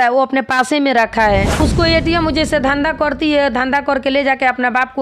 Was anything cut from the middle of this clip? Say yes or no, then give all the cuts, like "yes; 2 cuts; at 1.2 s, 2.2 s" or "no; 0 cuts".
yes; 1 cut; at 1.5 s